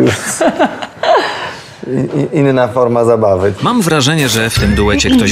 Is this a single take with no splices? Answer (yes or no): yes